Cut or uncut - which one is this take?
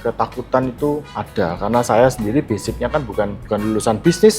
cut